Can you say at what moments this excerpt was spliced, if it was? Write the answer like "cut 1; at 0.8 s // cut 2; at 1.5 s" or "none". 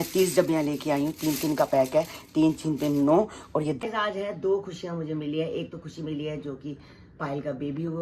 cut 1; at 3.8 s